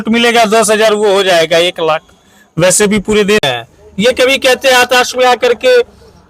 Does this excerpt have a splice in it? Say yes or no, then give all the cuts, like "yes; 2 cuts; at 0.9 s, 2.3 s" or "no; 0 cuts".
yes; 1 cut; at 3.5 s